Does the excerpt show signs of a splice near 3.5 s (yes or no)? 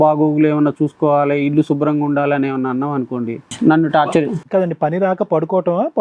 yes